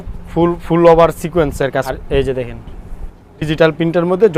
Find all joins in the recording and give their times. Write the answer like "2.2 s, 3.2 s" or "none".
1.9 s